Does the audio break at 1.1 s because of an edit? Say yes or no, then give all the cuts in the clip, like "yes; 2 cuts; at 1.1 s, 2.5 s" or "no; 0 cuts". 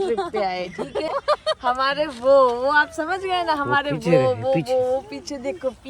yes; 1 cut; at 1.1 s